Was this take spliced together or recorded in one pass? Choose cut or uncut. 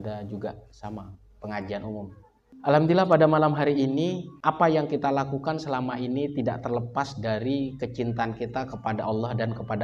uncut